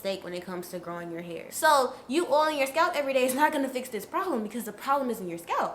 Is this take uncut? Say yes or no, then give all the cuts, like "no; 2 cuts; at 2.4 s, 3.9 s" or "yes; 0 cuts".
no; 1 cut; at 1.5 s